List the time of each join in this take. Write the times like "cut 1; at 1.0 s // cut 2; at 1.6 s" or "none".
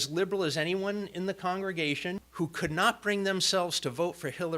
cut 1; at 2.2 s